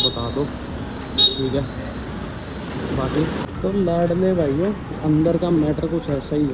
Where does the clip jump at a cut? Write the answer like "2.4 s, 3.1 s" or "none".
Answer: none